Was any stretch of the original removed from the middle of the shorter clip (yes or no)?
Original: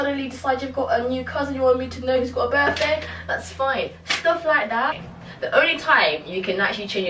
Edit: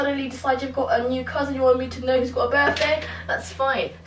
no